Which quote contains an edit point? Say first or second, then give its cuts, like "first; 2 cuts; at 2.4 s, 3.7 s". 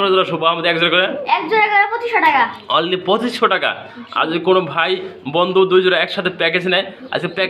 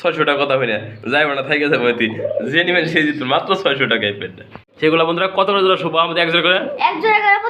second; 1 cut; at 4.6 s